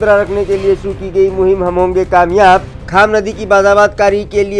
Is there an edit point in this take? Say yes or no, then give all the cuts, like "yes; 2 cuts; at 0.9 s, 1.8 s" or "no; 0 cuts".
no; 0 cuts